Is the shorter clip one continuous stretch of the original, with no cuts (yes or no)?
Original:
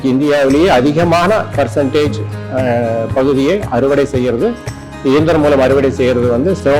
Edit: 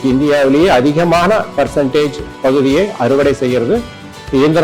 no